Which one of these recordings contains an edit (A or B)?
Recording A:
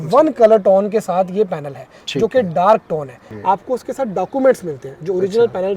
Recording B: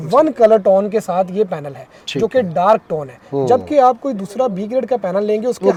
A